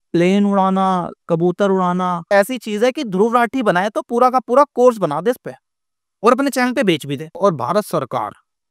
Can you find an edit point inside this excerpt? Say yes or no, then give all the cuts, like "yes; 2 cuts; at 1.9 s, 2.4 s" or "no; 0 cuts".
yes; 2 cuts; at 2.2 s, 7.4 s